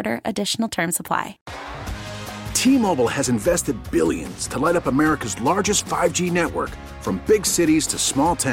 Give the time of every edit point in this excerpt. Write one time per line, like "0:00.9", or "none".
0:01.4